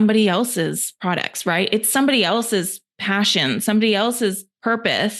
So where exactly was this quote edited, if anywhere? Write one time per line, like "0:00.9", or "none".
none